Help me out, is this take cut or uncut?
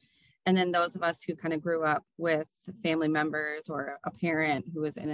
uncut